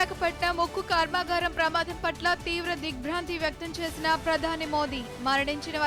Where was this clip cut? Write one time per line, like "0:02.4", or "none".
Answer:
none

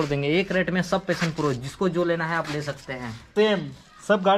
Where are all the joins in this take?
0:03.3

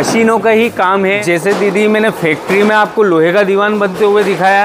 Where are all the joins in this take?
0:01.2

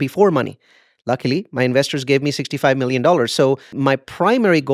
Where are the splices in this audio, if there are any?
0:03.7

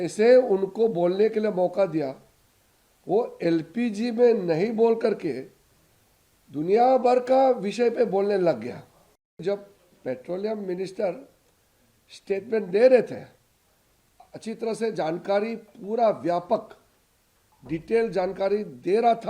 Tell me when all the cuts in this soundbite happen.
0:09.4

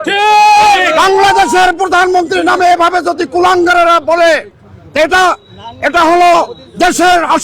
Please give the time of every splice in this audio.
none

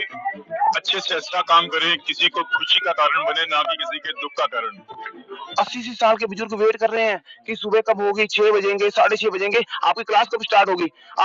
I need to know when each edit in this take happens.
0:05.3

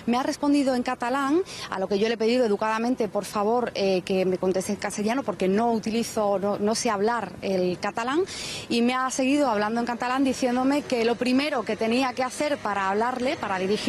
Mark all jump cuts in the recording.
0:11.3

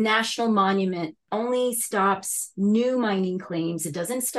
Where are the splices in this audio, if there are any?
0:01.2

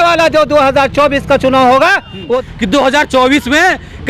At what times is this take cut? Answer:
0:02.3

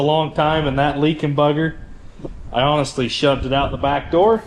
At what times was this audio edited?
none

